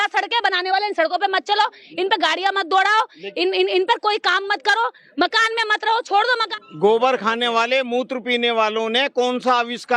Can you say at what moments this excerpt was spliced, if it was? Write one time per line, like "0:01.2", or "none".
0:06.5